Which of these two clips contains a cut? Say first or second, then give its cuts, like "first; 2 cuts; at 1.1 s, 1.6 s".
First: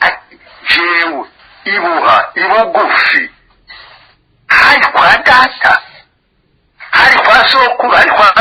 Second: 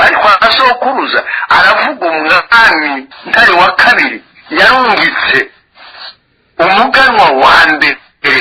second; 1 cut; at 3.1 s